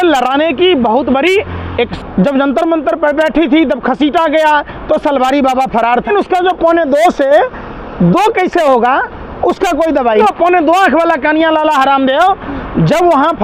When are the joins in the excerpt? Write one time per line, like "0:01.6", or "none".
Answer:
0:02.0
0:06.1
0:10.2